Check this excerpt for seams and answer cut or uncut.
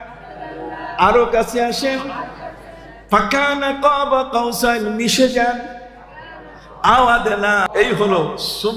uncut